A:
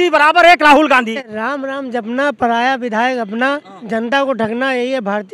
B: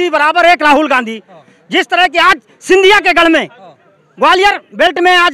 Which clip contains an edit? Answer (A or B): A